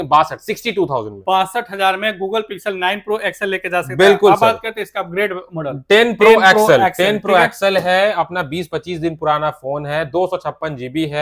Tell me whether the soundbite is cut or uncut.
uncut